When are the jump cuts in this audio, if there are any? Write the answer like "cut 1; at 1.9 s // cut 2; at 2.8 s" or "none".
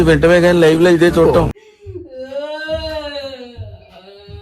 cut 1; at 1.5 s